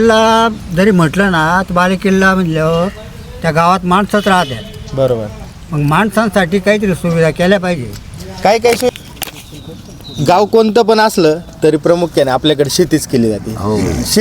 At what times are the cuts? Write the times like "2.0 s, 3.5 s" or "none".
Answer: 8.9 s